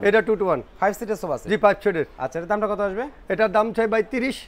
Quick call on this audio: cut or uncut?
uncut